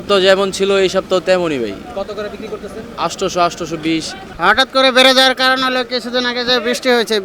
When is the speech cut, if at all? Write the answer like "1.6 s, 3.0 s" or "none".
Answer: 4.3 s